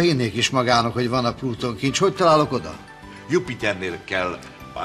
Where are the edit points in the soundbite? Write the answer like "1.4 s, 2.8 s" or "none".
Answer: 2.8 s